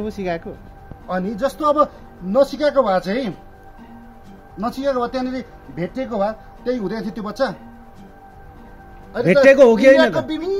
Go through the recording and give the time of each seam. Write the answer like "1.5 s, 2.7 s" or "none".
7.6 s, 9.1 s